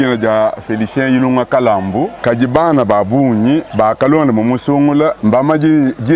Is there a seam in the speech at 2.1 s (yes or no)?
yes